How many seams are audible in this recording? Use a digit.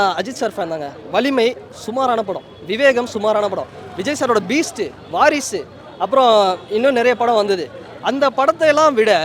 0